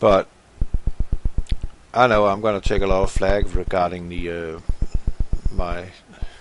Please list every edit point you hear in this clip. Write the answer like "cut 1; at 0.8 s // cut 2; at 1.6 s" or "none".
cut 1; at 3.1 s